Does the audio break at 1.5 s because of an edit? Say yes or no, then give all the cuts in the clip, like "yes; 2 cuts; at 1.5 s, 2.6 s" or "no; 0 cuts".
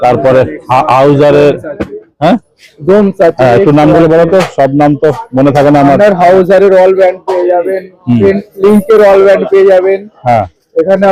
no; 0 cuts